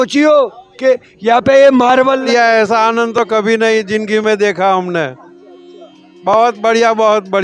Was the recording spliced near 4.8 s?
no; 1 cut; at 2.3 s

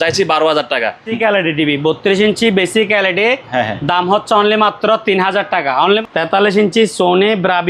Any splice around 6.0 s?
yes; 2 cuts; at 1.2 s, 6.0 s

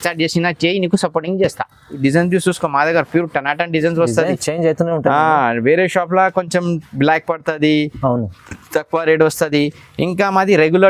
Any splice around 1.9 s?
yes; 1 cut; at 1.9 s

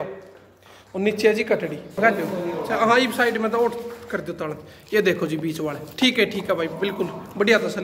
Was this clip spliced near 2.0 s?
yes; 1 cut; at 2.0 s

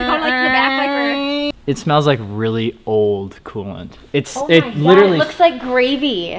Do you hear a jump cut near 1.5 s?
yes; 1 cut; at 1.5 s

